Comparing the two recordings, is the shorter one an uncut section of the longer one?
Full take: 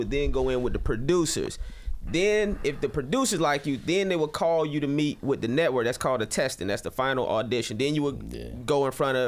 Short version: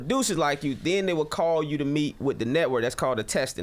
yes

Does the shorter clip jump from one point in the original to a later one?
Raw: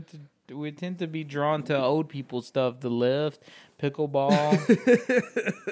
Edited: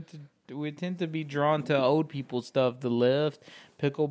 no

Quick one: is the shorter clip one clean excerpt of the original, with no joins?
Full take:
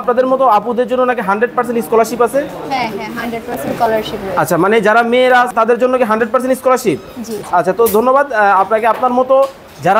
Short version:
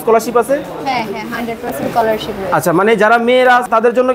yes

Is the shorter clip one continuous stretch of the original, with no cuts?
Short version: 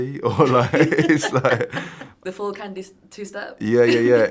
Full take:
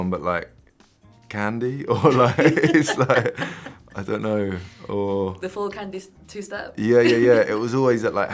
no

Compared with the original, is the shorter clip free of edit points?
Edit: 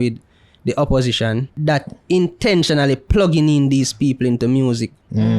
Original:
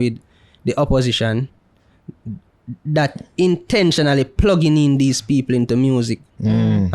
no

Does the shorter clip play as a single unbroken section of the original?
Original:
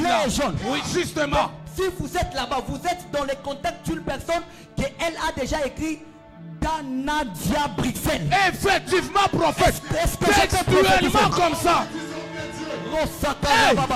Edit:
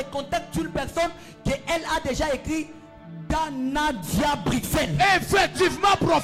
yes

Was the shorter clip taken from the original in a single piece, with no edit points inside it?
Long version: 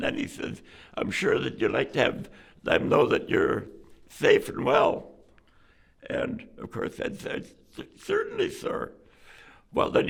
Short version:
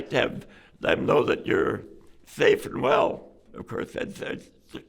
no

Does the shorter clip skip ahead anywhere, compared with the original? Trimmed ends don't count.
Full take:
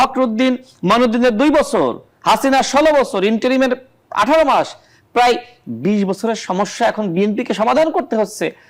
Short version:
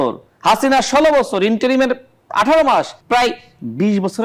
yes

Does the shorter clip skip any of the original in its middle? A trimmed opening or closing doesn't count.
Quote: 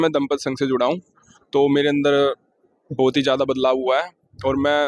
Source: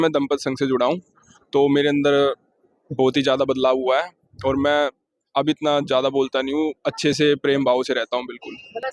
no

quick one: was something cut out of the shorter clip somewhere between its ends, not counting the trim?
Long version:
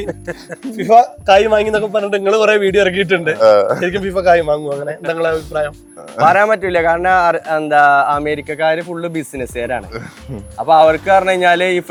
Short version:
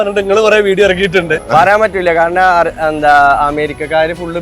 yes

